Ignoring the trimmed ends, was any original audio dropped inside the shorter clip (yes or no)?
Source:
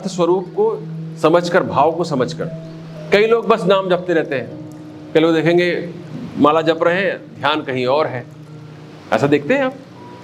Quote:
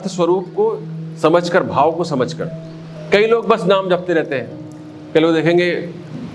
no